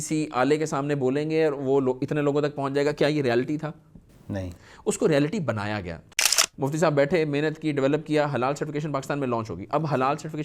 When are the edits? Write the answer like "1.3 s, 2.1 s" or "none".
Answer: 6.2 s